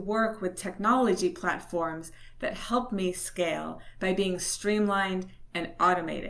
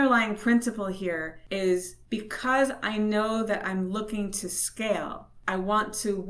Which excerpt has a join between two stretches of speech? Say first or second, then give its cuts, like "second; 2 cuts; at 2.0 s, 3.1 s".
second; 3 cuts; at 1.3 s, 2.0 s, 5.3 s